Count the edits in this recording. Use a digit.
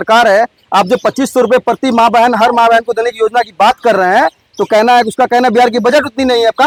0